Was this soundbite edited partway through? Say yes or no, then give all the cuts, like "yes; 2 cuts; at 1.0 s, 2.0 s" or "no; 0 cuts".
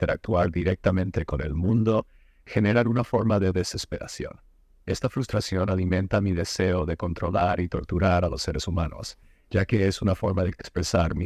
no; 0 cuts